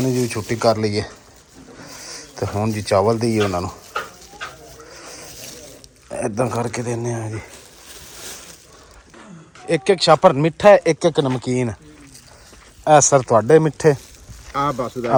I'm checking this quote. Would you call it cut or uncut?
uncut